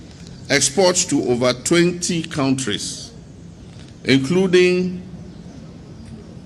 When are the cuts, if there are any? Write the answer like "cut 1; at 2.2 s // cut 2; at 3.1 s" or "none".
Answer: none